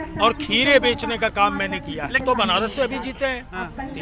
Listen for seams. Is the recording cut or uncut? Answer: cut